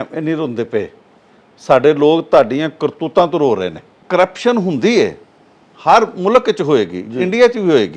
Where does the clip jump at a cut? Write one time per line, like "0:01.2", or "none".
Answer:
0:03.9